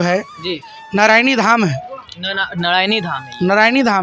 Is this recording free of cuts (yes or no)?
yes